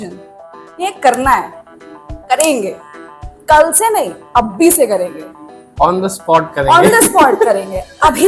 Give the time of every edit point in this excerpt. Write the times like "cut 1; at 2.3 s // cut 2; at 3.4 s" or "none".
none